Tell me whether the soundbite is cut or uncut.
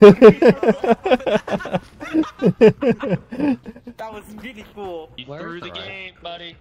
uncut